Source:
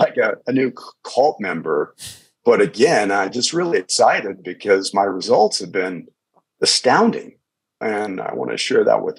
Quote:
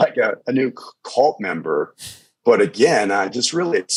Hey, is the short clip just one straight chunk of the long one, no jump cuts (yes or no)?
yes